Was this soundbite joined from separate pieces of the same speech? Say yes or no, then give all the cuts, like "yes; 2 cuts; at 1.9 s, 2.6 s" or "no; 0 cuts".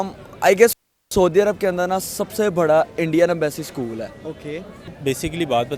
yes; 1 cut; at 4.9 s